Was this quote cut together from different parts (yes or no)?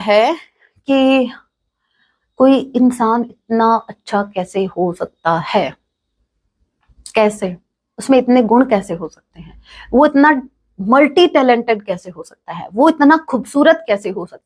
no